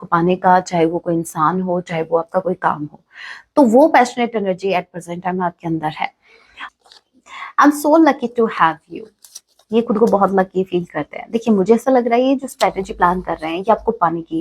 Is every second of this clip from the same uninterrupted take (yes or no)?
no